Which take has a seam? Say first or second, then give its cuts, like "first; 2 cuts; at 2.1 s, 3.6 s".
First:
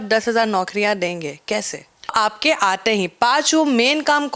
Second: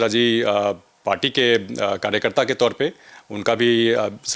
first; 1 cut; at 2.1 s